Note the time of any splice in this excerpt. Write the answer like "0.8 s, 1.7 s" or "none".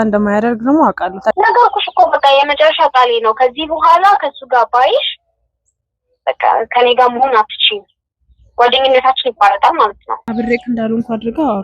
1.3 s, 10.2 s